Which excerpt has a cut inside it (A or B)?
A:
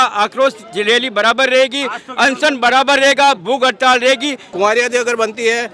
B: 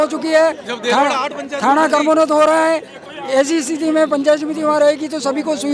A